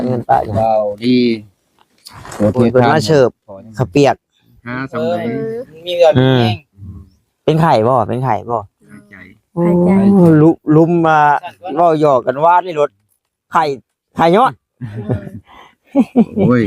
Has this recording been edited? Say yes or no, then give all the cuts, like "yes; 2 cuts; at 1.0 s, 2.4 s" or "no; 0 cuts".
yes; 1 cut; at 2.7 s